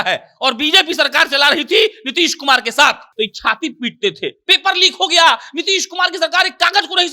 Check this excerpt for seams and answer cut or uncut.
cut